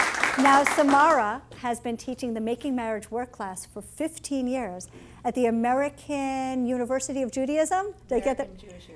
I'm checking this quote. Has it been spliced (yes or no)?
no